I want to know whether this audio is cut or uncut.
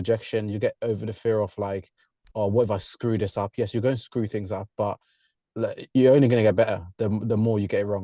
uncut